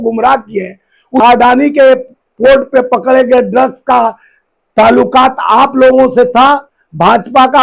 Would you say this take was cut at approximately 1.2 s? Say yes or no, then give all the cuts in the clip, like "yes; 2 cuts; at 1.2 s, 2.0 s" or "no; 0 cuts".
yes; 1 cut; at 1.2 s